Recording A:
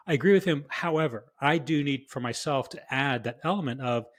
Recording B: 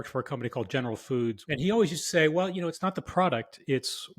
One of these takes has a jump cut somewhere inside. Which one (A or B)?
B